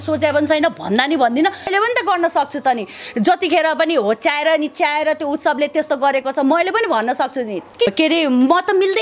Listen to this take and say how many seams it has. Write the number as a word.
two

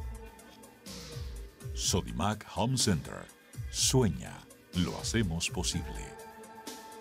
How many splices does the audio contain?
one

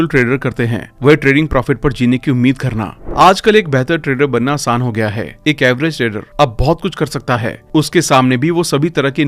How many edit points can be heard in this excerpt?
one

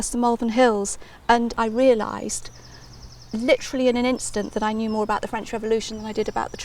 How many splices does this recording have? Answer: one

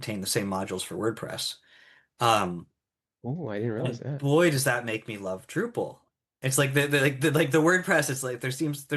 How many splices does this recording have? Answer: zero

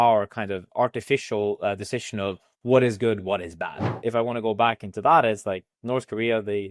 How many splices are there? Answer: one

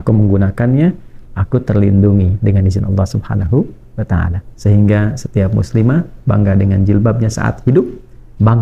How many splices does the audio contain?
one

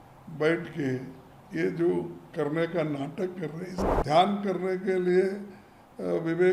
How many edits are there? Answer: one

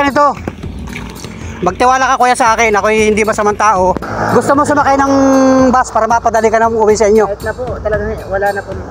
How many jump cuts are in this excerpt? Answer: one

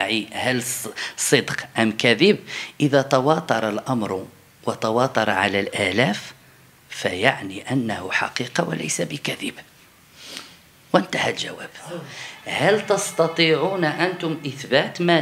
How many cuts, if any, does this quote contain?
one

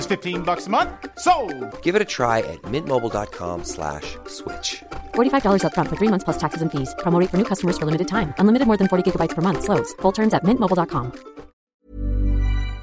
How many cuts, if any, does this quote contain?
one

